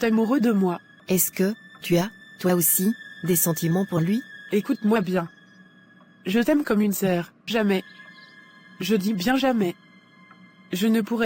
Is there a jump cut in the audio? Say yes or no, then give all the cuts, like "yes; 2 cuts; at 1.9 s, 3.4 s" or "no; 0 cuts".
yes; 3 cuts; at 0.9 s, 4.4 s, 7.4 s